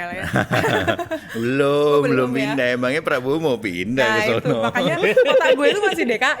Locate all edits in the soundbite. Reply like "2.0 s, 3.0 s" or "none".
none